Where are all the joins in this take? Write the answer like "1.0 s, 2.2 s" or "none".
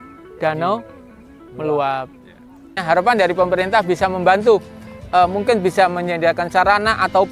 2.8 s